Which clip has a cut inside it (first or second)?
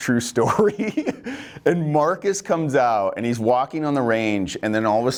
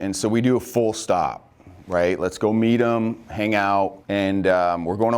second